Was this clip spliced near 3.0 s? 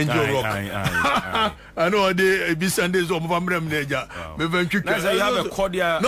no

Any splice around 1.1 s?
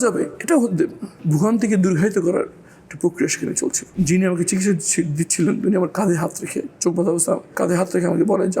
yes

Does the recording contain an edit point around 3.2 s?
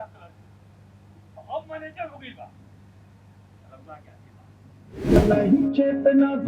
no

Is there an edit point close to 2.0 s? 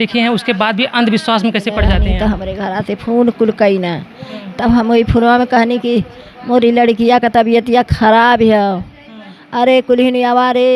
yes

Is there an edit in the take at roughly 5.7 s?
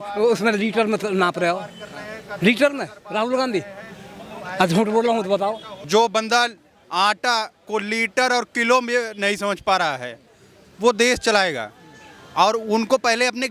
yes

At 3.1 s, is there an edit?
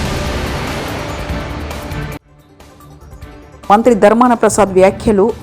yes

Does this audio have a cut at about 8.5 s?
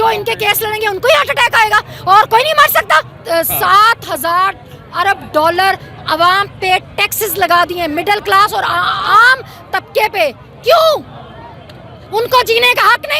no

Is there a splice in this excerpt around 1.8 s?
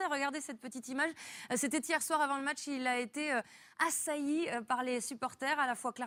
no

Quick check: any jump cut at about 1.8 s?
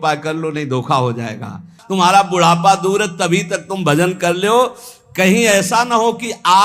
yes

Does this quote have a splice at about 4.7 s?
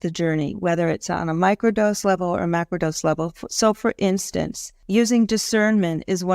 yes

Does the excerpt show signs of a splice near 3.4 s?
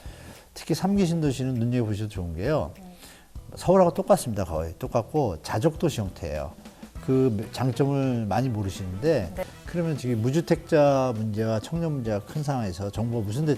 no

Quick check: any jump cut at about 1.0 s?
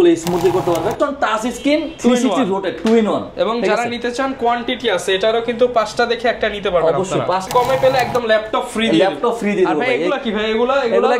yes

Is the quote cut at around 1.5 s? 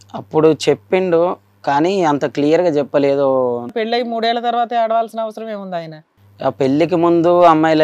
no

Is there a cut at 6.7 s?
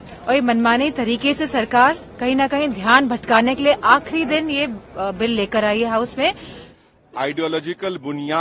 yes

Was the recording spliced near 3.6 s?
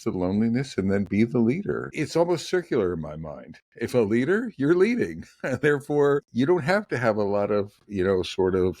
no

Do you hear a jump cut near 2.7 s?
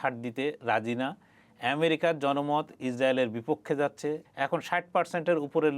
no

